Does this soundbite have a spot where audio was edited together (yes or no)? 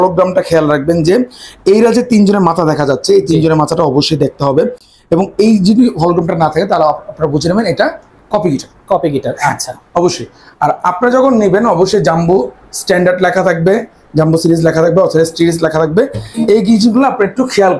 no